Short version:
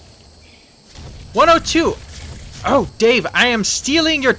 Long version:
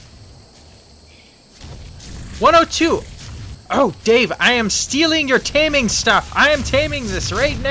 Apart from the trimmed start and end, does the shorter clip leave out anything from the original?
yes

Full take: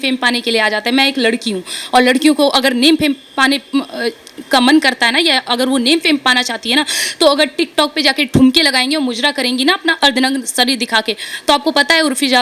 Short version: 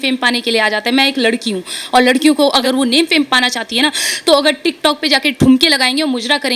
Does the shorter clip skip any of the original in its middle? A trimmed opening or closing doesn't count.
yes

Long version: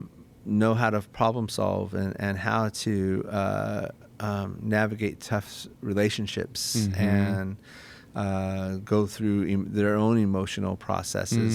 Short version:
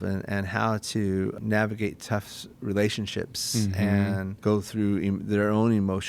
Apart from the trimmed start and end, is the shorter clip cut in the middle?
yes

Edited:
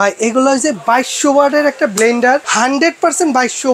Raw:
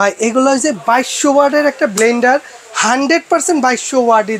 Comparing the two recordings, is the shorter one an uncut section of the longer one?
no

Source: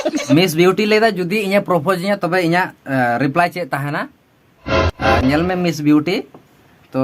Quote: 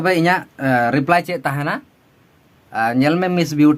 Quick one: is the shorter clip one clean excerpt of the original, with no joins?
yes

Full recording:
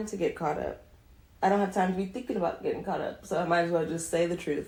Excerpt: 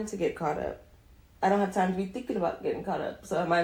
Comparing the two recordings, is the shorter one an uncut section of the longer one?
yes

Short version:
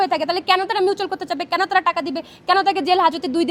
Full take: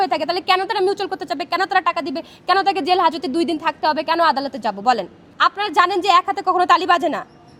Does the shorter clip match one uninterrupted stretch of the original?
yes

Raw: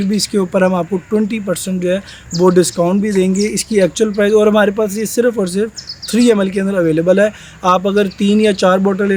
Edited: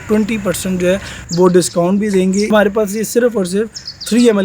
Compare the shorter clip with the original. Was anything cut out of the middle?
yes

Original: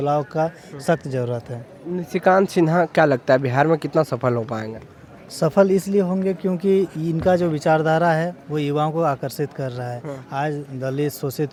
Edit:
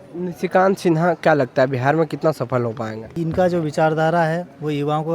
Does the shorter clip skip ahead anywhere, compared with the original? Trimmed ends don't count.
yes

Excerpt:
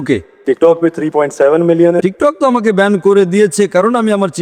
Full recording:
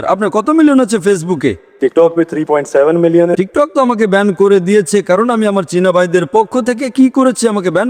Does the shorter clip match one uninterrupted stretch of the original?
yes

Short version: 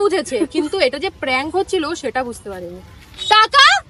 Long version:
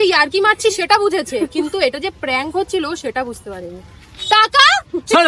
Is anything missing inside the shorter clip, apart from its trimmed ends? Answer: no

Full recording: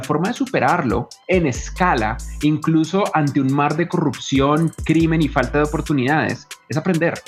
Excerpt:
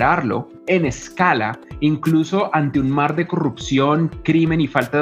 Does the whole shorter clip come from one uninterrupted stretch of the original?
yes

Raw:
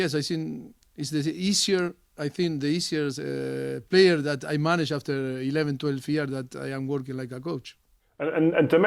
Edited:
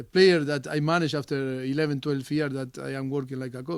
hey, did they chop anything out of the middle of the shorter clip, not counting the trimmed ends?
no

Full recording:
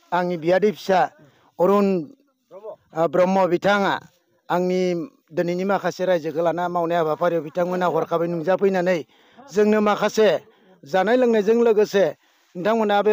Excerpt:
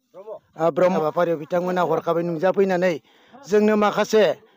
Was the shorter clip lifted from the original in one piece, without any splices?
no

